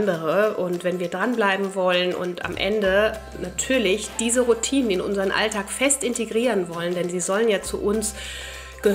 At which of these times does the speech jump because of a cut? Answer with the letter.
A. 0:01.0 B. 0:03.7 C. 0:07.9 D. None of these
D